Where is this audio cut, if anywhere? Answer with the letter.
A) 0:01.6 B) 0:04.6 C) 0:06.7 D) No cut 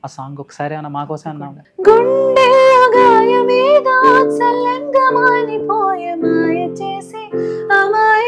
A